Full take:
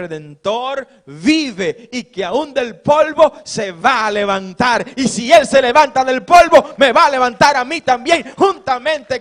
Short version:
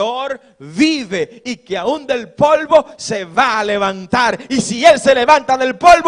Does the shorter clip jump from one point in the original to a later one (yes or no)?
no